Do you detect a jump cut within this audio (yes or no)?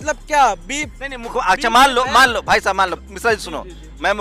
no